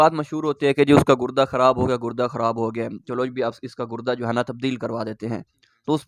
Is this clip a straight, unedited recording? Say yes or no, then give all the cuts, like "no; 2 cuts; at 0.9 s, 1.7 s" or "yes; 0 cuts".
yes; 0 cuts